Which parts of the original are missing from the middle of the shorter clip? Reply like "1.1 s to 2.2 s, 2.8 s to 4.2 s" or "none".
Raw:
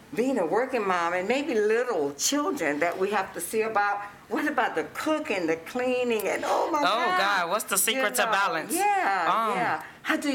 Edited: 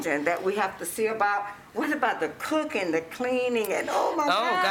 none